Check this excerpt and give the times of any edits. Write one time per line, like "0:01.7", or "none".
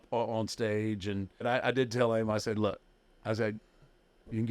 0:01.4